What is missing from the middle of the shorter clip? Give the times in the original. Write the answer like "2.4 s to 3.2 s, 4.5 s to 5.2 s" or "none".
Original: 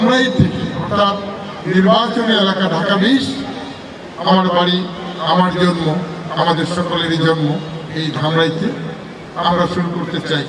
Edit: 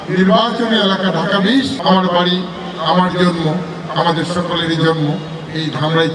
3.3 s to 4.2 s